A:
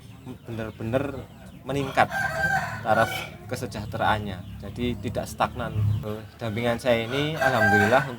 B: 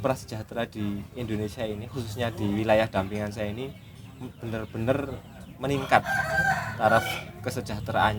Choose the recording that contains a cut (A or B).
A